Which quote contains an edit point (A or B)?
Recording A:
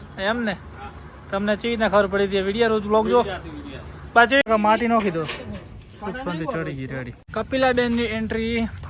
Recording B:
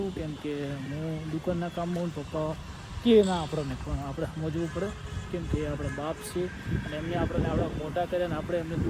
A